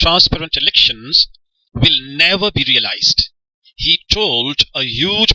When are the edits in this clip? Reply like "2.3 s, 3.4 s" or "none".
none

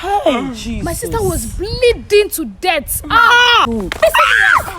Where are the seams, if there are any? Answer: 3.7 s

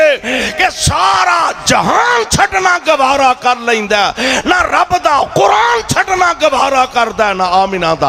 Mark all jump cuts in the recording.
none

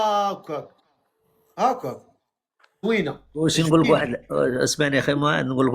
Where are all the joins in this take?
2.8 s

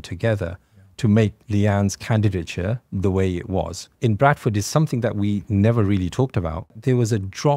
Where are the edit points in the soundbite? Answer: 3.9 s, 6.8 s

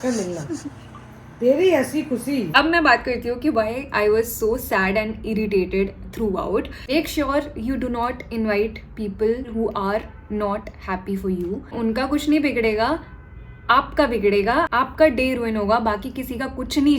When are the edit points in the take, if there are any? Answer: 2.5 s, 6.9 s, 11.7 s

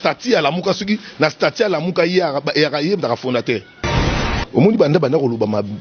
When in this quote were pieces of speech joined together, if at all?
4.1 s

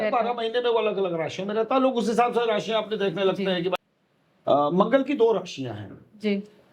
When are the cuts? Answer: 3.8 s

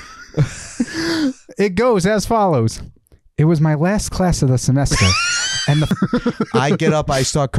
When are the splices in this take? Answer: 5.9 s

